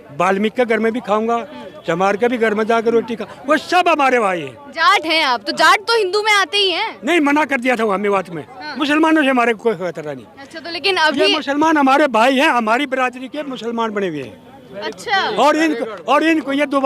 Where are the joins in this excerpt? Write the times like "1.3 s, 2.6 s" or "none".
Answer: 8.7 s

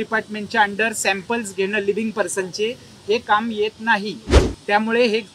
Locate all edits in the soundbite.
none

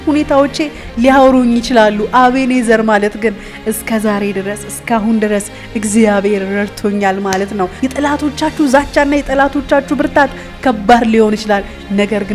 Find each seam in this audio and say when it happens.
7.7 s

